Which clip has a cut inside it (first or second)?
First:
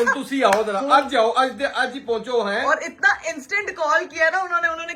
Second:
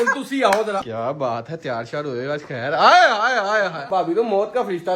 second